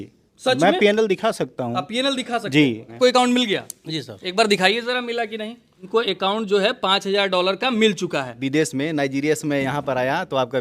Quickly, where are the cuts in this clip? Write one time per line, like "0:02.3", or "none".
0:03.0
0:05.9
0:08.4